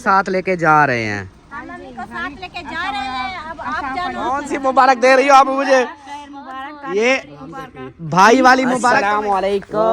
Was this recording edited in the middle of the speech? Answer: yes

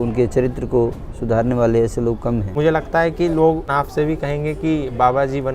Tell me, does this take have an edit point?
yes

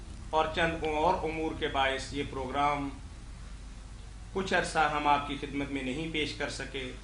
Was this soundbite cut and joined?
yes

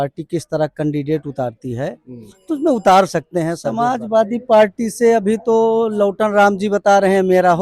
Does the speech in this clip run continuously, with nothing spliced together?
no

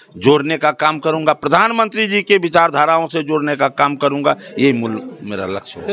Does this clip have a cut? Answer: no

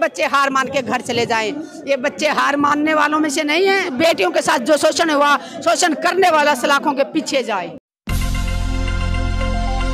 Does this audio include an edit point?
yes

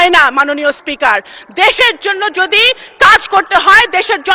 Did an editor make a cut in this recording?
no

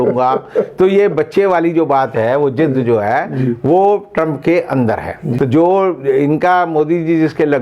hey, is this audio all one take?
no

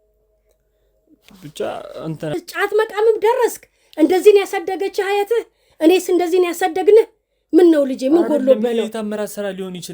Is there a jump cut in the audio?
yes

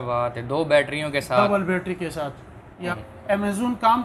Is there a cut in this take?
yes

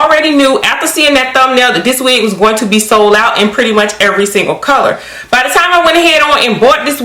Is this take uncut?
yes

